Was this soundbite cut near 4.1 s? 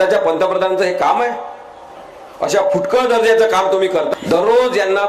yes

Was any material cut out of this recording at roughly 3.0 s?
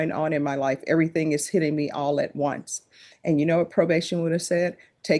no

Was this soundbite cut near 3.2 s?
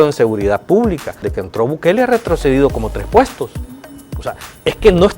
no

